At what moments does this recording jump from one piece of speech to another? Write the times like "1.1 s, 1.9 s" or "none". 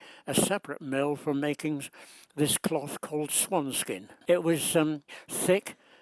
4.1 s, 5.1 s